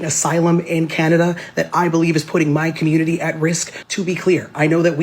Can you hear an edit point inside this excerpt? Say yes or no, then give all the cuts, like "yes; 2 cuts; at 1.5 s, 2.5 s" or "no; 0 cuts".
yes; 1 cut; at 3.7 s